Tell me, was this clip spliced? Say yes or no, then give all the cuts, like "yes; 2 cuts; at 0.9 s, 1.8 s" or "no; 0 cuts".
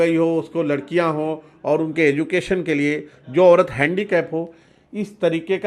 no; 0 cuts